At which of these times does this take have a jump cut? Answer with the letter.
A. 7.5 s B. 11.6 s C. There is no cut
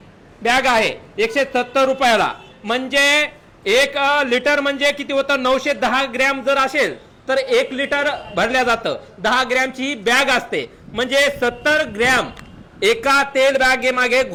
C